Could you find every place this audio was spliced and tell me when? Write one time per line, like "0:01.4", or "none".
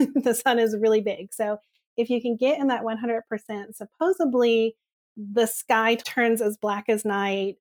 0:06.0